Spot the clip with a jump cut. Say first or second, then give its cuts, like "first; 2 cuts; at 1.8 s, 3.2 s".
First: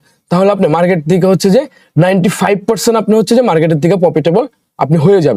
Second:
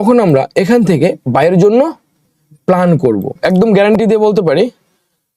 second; 1 cut; at 3.4 s